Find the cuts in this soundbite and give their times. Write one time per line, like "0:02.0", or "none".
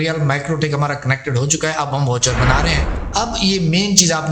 0:03.0